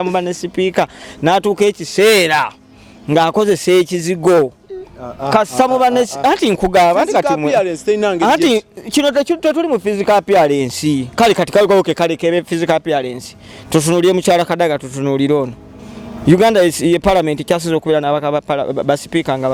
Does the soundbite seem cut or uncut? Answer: uncut